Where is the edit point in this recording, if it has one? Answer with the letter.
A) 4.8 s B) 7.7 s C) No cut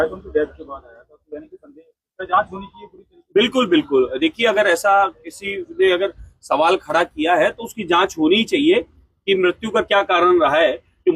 C